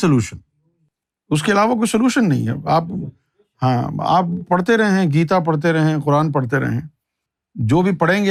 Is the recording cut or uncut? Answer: uncut